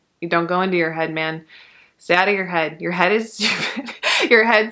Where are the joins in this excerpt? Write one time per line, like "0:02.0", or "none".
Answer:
none